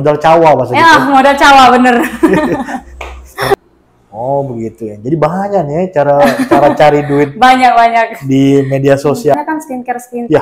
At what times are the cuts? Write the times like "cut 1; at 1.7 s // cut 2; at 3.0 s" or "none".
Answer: cut 1; at 3.5 s // cut 2; at 9.3 s